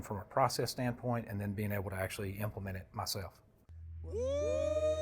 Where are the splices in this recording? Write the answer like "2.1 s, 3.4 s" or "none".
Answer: 3.9 s